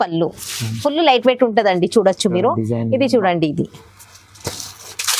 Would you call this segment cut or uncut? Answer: uncut